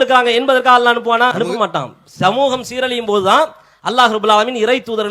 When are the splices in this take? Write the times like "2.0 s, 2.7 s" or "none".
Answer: 1.3 s